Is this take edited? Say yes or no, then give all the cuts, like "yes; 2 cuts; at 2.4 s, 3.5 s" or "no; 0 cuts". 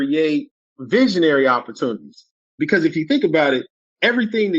yes; 1 cut; at 2.4 s